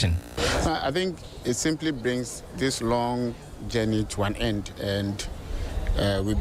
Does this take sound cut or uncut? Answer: uncut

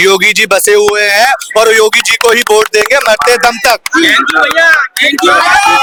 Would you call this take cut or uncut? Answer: uncut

